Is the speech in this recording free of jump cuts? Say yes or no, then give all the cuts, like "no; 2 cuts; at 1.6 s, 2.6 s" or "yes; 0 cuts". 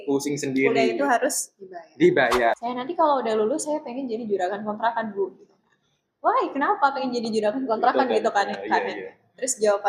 no; 1 cut; at 2.6 s